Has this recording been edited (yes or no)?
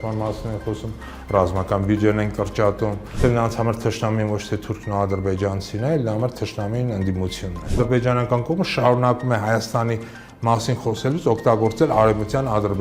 yes